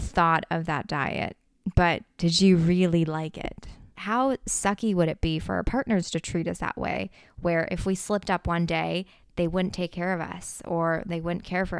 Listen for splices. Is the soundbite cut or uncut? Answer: cut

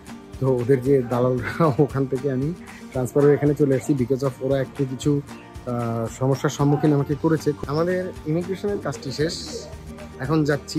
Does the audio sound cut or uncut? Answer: cut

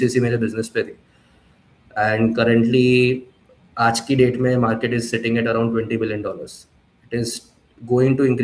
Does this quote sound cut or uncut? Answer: uncut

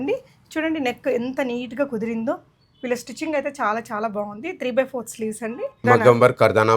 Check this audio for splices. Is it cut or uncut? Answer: cut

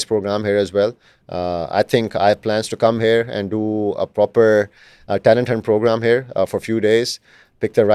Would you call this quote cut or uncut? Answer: uncut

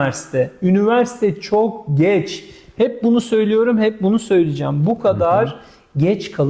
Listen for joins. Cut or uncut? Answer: uncut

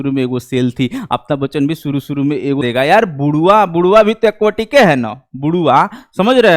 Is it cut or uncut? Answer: cut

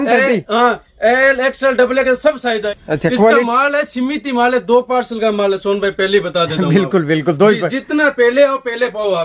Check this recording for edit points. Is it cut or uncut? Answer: cut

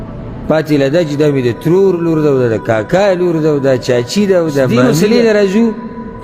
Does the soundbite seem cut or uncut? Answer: cut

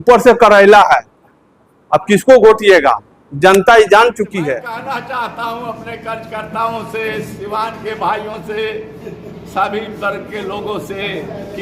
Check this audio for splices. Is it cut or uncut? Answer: cut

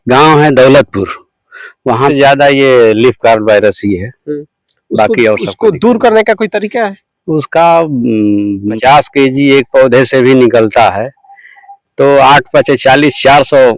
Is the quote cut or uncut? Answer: cut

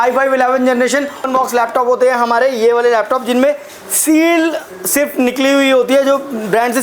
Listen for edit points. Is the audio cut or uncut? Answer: cut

